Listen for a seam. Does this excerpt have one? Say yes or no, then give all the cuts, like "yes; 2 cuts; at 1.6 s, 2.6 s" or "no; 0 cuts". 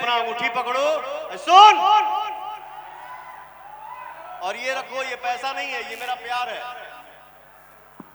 no; 0 cuts